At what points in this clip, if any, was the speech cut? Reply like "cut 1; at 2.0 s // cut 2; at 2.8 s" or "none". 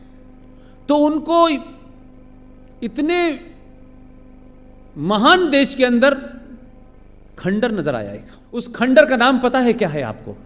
cut 1; at 8.7 s

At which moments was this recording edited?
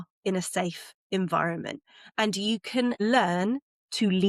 cut 1; at 3.0 s

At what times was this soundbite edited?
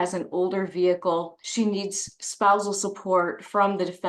cut 1; at 1.4 s

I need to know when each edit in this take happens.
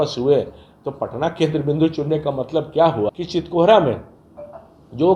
cut 1; at 3.1 s

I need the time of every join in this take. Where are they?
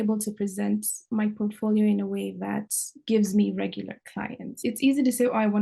cut 1; at 4.6 s

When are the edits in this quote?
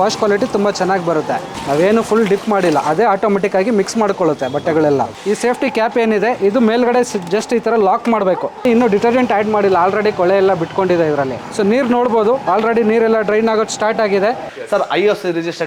cut 1; at 1.5 s // cut 2; at 5.1 s // cut 3; at 8.6 s // cut 4; at 11.4 s // cut 5; at 14.5 s

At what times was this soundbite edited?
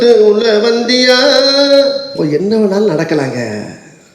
cut 1; at 2.1 s

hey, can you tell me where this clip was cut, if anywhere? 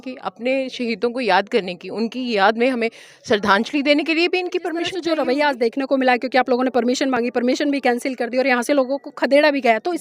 cut 1; at 5.0 s

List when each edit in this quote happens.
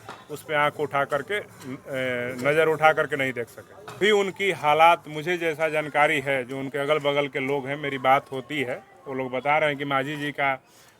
cut 1; at 4.0 s

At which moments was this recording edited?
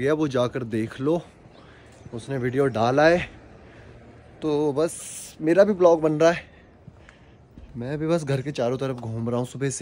none

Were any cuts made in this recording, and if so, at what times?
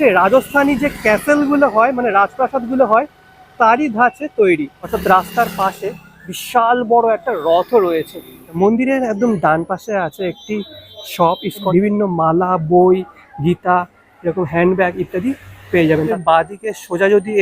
cut 1; at 5.0 s // cut 2; at 8.6 s // cut 3; at 11.7 s // cut 4; at 16.1 s

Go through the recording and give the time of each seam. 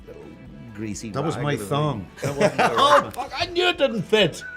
none

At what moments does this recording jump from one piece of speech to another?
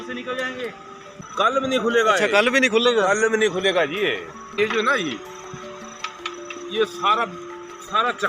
cut 1; at 1.1 s // cut 2; at 4.5 s

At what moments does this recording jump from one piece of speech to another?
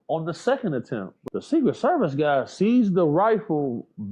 cut 1; at 1.1 s

